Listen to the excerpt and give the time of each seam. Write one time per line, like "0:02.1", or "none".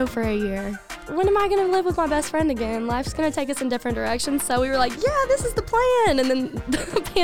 0:01.0